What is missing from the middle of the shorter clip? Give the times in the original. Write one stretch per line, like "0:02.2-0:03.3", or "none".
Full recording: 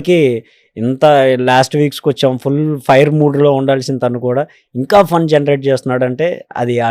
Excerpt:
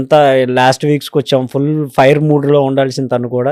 none

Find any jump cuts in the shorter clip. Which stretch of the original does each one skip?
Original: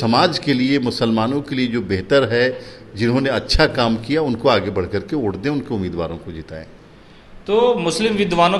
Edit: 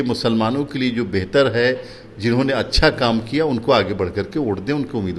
none

